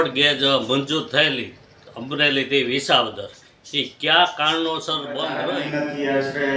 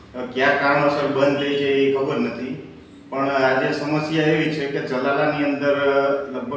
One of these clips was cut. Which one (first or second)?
first